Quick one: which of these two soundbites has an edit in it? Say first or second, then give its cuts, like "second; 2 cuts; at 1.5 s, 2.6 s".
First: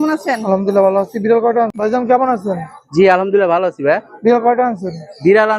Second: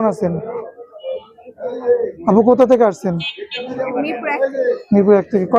first; 1 cut; at 1.7 s